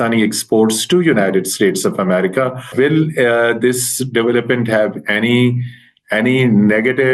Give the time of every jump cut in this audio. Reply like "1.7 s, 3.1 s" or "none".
2.7 s

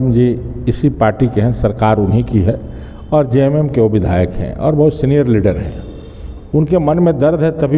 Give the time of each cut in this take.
none

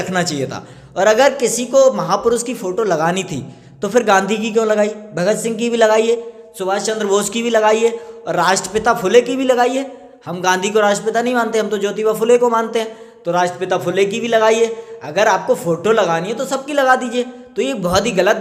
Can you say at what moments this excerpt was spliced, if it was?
none

